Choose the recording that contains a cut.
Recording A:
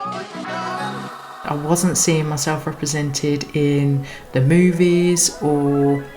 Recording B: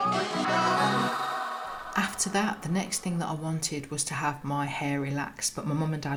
A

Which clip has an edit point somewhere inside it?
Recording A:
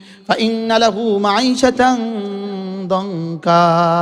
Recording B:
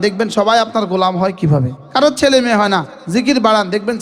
B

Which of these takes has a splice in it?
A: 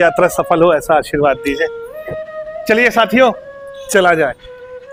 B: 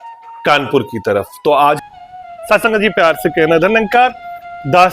B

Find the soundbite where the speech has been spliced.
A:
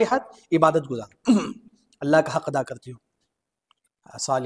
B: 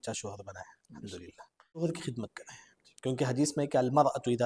B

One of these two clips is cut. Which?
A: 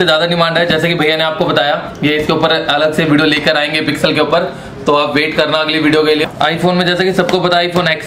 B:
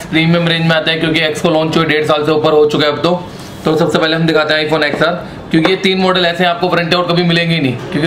A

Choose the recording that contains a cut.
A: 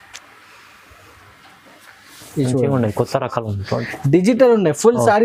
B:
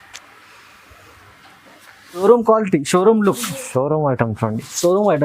B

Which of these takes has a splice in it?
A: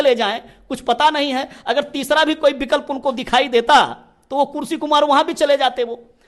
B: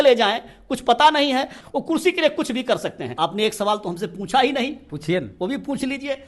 B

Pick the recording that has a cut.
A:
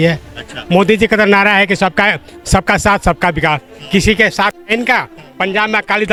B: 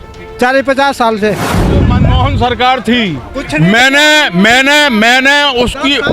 B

